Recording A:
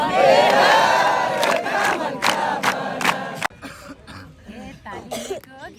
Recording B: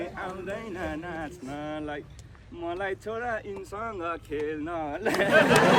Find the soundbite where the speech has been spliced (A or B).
A